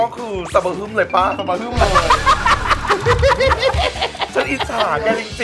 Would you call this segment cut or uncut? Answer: uncut